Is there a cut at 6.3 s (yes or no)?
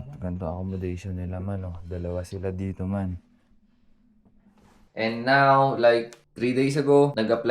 no